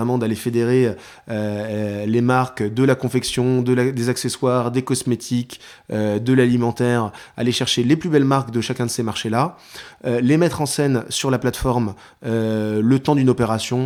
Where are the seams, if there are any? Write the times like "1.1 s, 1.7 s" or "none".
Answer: none